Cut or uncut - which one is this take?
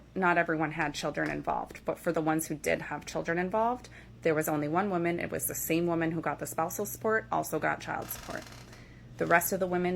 cut